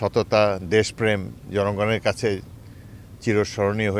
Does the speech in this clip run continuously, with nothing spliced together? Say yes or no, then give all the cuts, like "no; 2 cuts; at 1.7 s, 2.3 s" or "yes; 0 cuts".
yes; 0 cuts